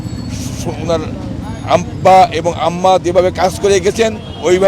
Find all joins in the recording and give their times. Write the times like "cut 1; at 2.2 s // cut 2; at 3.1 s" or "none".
none